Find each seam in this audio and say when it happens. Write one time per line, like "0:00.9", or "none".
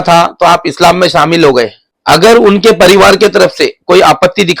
0:01.9

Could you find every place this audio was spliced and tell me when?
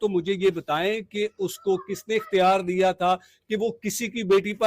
none

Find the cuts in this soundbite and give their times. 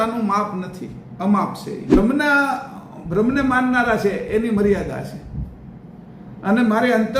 0:02.0

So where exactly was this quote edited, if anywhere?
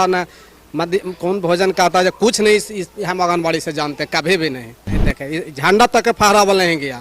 0:05.1

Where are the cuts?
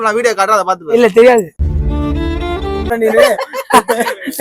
0:02.9

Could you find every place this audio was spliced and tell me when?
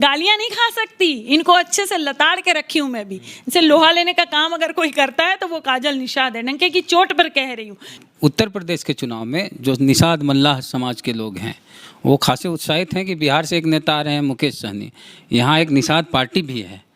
0:07.9

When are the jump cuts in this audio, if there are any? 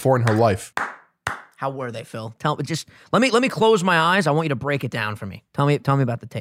none

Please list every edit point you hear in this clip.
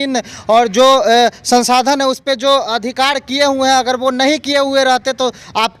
none

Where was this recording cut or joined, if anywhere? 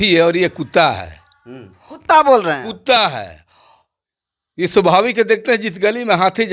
none

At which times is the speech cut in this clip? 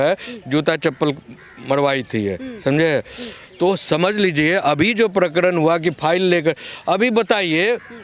none

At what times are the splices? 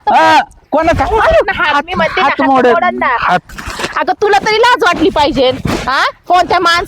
0:03.5

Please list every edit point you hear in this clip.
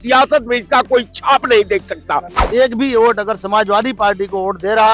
0:02.4

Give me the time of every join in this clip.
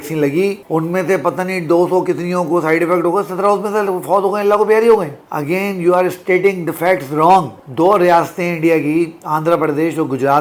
none

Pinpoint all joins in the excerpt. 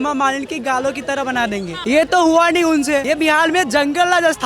0:01.7
0:03.0

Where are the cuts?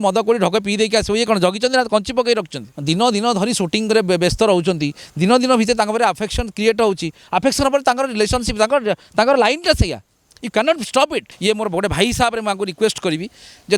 0:02.7
0:11.3

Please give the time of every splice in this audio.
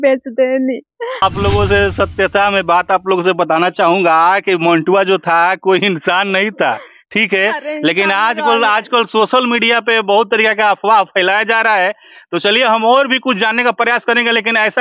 0:01.2

